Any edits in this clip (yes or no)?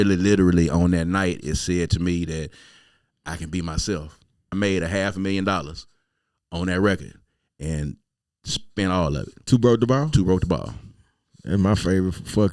yes